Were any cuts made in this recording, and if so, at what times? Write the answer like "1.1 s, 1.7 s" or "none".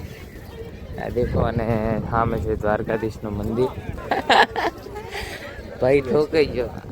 3.9 s